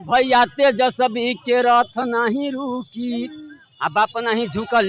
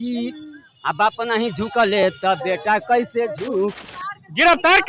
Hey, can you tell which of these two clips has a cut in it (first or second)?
second